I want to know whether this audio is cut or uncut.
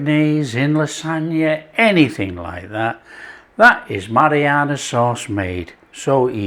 uncut